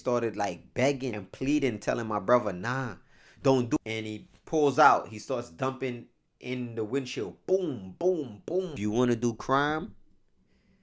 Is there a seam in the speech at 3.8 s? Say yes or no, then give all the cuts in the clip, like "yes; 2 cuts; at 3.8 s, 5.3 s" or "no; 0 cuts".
yes; 3 cuts; at 1.2 s, 3.8 s, 8.7 s